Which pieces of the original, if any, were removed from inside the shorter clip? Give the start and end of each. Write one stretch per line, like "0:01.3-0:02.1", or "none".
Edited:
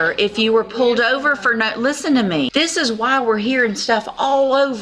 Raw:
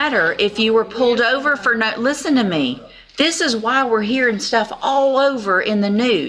0:02.7-0:03.1